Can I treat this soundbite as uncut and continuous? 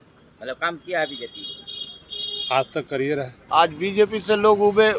no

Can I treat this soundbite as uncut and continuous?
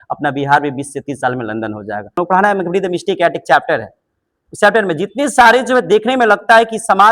no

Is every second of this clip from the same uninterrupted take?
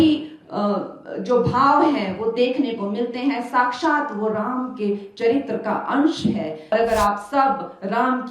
no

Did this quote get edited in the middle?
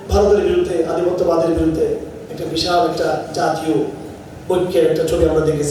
no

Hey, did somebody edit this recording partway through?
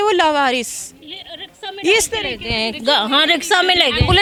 no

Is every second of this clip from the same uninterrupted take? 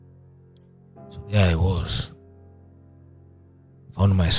no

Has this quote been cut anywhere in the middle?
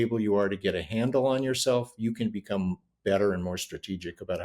no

